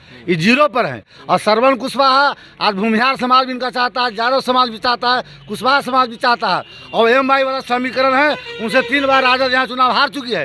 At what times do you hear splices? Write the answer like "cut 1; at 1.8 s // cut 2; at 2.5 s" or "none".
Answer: none